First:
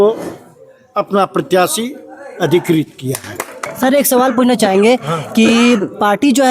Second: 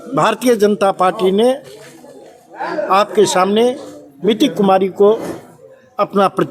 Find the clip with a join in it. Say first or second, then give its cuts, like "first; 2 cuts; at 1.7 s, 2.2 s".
first; 1 cut; at 3.6 s